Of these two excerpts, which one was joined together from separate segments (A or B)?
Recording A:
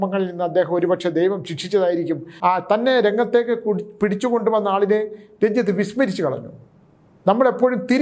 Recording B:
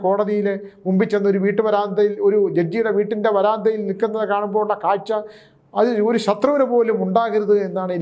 A